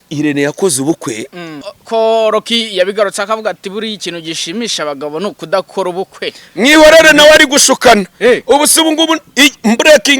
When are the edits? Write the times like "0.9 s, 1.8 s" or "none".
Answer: 1.8 s